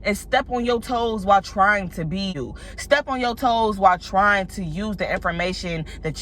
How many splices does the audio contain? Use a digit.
1